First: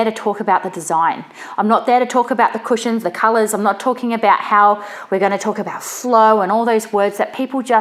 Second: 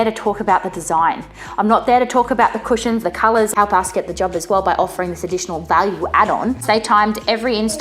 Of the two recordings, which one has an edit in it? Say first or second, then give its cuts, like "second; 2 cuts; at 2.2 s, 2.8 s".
second; 2 cuts; at 3.5 s, 6.6 s